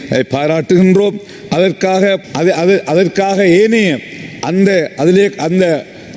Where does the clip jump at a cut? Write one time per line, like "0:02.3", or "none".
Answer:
none